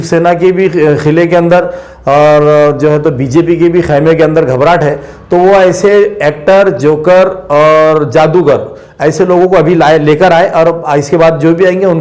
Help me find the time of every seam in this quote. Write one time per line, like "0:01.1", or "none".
none